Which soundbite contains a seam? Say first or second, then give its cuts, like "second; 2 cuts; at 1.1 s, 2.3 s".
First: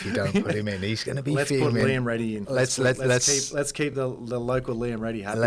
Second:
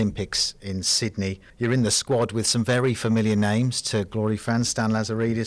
second; 1 cut; at 1.5 s